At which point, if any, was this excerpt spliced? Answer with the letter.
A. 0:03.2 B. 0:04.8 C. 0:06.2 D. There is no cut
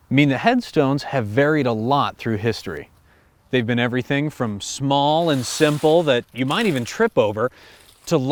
D